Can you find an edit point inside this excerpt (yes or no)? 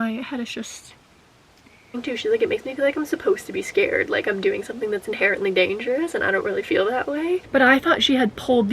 yes